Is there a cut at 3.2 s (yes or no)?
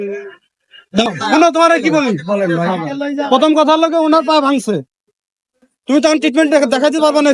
no